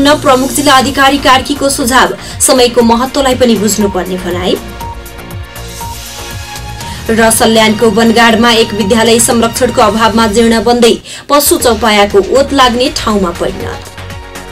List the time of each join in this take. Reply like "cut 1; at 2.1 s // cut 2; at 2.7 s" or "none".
cut 1; at 13.6 s